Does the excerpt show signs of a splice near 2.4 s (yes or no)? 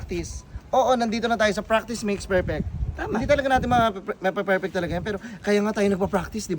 no